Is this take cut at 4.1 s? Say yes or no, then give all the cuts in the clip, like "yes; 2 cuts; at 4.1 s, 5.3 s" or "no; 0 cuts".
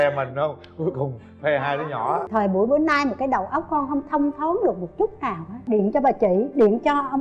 no; 2 cuts; at 2.3 s, 5.6 s